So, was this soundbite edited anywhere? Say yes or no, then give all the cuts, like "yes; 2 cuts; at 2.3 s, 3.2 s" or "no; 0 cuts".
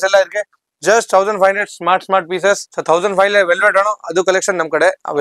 yes; 1 cut; at 2.7 s